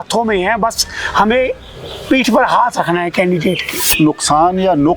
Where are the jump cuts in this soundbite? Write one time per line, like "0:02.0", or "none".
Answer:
0:03.8